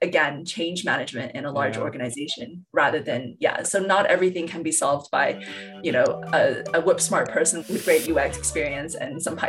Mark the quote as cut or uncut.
uncut